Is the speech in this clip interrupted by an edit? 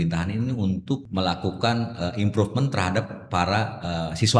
yes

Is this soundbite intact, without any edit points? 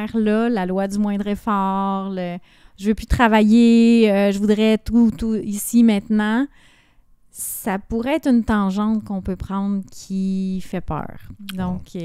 yes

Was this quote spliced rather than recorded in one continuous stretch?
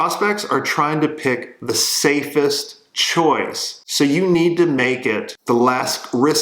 no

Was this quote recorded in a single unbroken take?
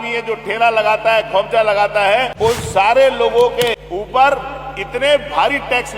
no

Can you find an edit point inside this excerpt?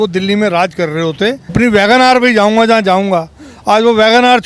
yes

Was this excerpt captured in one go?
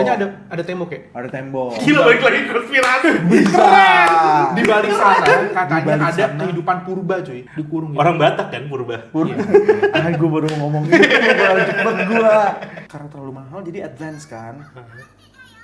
no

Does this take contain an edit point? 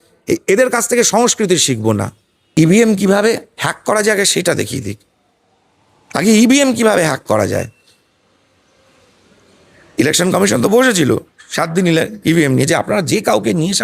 yes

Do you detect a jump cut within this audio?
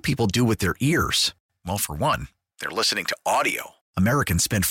no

